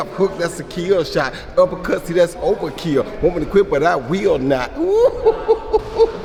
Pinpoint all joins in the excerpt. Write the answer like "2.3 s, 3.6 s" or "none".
none